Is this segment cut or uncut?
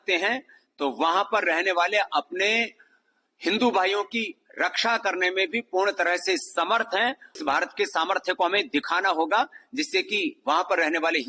cut